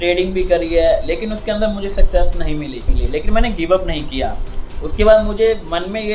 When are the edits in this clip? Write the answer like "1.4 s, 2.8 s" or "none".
3.0 s